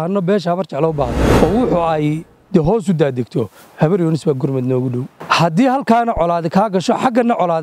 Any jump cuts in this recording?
yes; 2 cuts; at 1.2 s, 5.1 s

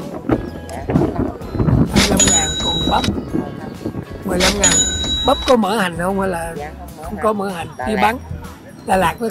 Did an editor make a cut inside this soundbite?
no; 0 cuts

